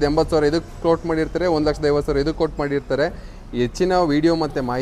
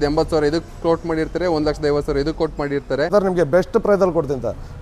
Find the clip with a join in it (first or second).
second